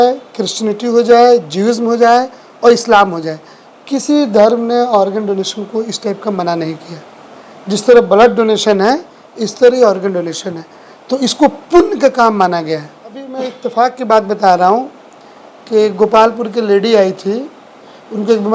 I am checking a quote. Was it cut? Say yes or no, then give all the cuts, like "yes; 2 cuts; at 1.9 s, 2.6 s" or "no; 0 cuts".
yes; 1 cut; at 13.5 s